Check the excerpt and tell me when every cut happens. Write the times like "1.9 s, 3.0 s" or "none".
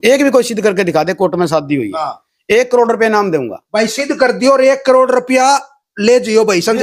none